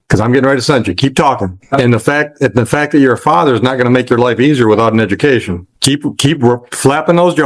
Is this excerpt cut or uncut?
cut